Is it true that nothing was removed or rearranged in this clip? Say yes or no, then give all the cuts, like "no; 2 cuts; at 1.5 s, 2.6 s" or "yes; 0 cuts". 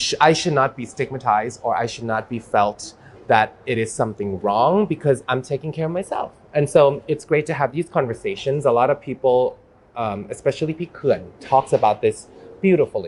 yes; 0 cuts